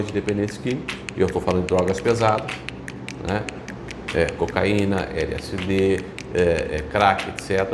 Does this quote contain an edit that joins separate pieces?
no; 0 cuts

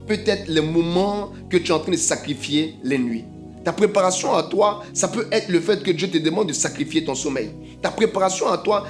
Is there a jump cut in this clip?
no; 0 cuts

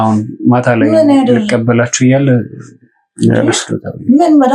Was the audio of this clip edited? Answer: no; 0 cuts

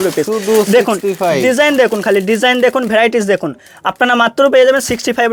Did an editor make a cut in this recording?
no; 0 cuts

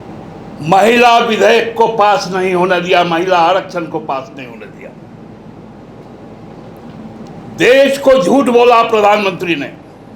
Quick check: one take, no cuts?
yes; 0 cuts

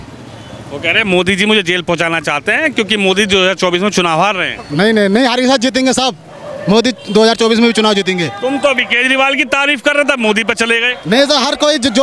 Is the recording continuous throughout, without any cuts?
yes; 0 cuts

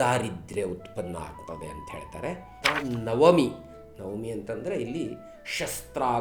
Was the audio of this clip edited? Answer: yes; 1 cut; at 2.6 s

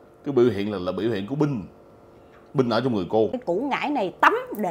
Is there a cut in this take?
yes; 1 cut; at 3.4 s

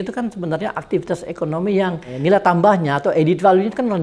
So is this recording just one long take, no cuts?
no; 1 cut; at 2.1 s

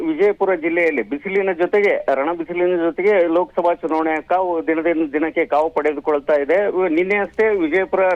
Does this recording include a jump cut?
no; 0 cuts

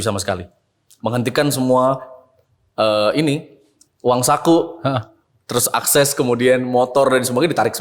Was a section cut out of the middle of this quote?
no; 0 cuts

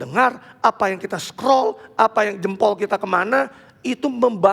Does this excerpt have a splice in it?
no; 0 cuts

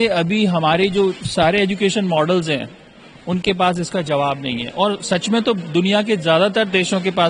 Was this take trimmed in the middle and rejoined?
no; 0 cuts

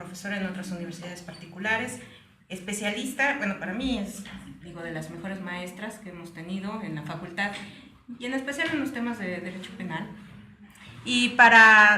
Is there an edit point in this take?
yes; 1 cut; at 9.6 s

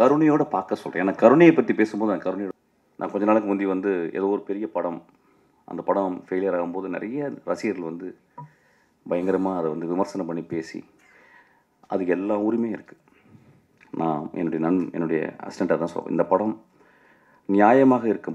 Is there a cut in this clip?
yes; 1 cut; at 2.5 s

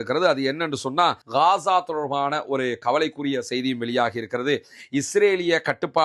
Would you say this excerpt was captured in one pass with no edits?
no; 1 cut; at 1.2 s

